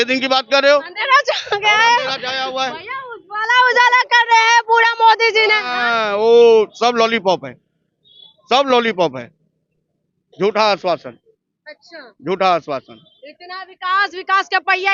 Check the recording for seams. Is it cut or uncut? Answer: uncut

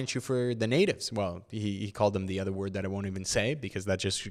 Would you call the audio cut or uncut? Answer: uncut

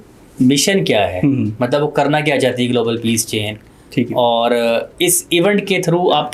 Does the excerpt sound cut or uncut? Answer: uncut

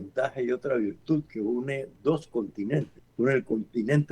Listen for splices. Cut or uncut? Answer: cut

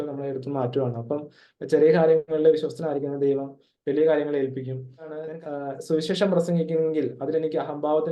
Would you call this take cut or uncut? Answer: cut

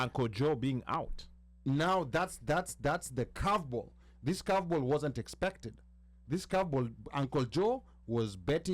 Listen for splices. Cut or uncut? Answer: uncut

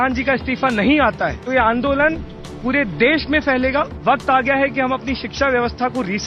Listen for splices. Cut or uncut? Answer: cut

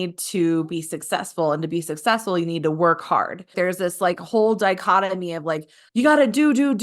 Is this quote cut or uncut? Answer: cut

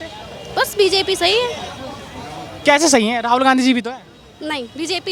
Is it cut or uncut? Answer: uncut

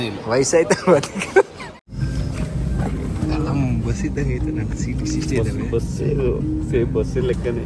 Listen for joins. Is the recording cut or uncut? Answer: cut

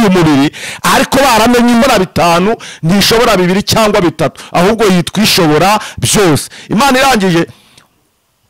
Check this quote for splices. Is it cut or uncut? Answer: cut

